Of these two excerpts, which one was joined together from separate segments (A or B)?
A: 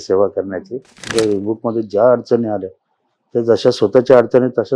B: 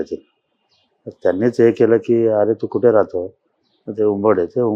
A